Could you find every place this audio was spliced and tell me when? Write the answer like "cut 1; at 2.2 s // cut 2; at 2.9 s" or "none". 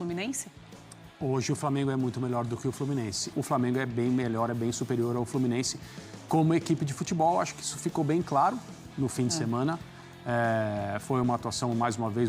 cut 1; at 3.3 s